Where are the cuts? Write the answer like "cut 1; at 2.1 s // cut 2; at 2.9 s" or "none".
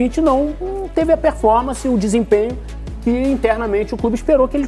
none